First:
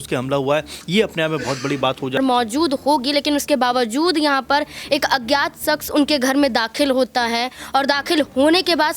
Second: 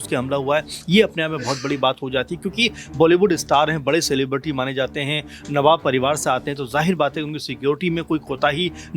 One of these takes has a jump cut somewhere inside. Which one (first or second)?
first